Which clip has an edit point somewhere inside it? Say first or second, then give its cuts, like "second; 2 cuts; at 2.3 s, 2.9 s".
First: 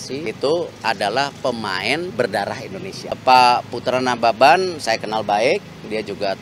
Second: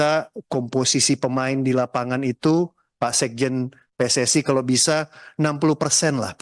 first; 1 cut; at 3.1 s